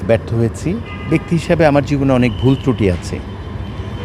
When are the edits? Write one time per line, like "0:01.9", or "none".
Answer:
0:00.9